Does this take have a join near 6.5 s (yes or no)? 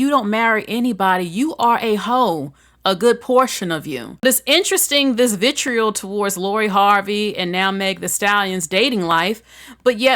no